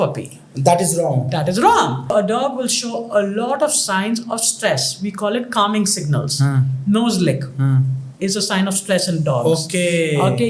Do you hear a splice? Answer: yes; 1 cut; at 2.1 s

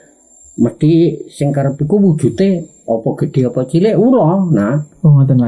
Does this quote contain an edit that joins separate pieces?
no; 0 cuts

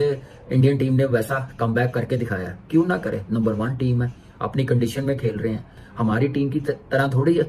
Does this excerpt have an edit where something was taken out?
no; 0 cuts

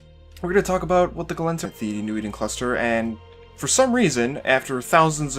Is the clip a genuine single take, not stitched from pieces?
yes; 0 cuts

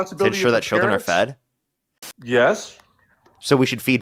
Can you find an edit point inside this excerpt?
yes; 1 cut; at 2.1 s

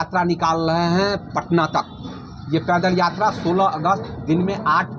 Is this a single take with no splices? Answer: yes; 0 cuts

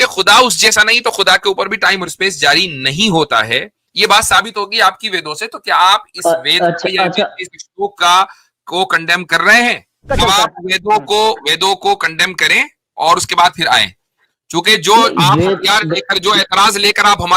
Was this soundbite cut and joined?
yes; 1 cut; at 10.1 s

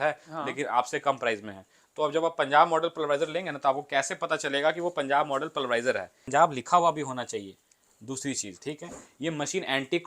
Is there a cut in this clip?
yes; 1 cut; at 6.2 s

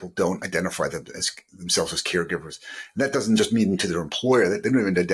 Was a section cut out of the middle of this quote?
no; 0 cuts

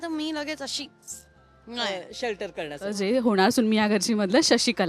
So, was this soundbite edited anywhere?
yes; 1 cut; at 3.0 s

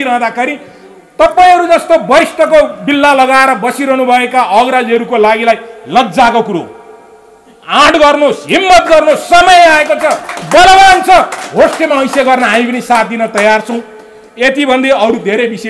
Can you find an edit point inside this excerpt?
no; 0 cuts

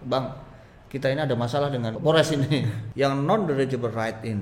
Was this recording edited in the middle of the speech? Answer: yes; 2 cuts; at 1.9 s, 2.8 s

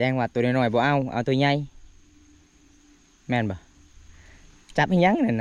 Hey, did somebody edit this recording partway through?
no; 0 cuts

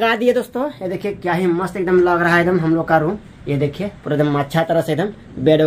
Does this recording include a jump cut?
no; 0 cuts

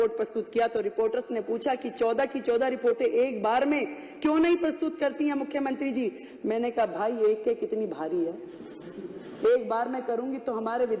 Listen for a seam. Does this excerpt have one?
no; 0 cuts

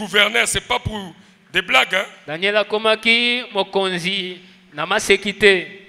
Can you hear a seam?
no; 0 cuts

